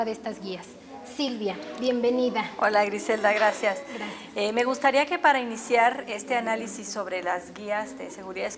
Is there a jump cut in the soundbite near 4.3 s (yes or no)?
no